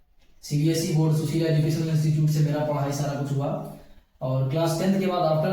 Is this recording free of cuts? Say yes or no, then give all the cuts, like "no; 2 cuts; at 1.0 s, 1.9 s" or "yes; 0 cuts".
yes; 0 cuts